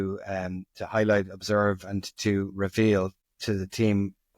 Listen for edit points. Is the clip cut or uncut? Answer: cut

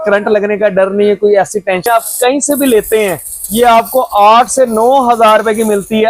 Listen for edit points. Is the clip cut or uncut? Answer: cut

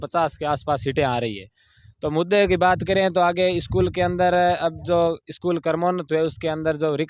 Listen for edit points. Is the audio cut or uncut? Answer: uncut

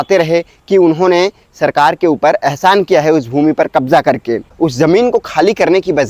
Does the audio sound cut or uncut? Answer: cut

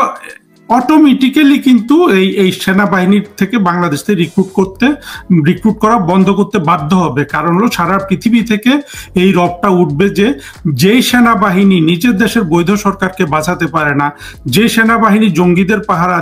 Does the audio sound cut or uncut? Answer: uncut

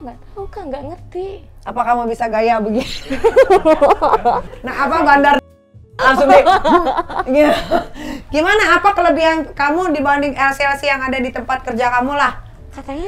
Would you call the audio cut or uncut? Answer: uncut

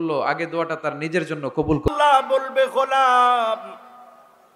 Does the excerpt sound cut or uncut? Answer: cut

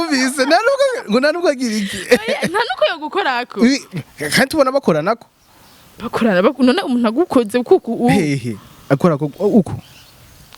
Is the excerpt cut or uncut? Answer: uncut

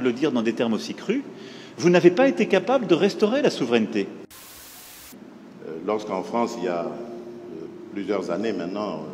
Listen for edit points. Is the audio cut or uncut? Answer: cut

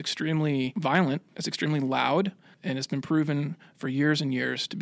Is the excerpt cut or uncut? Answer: cut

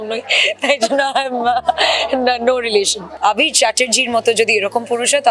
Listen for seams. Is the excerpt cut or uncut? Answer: cut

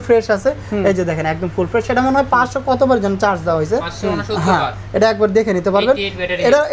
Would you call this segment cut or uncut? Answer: uncut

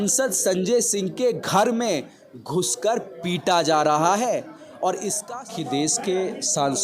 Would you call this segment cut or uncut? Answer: cut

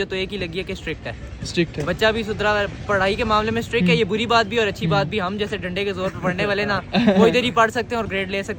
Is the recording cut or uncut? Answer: uncut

